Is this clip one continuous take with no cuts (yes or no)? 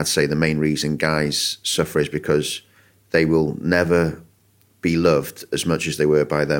yes